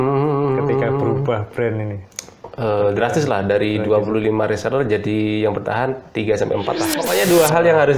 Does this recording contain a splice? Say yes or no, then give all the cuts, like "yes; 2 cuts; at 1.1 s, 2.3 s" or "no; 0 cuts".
yes; 1 cut; at 7.0 s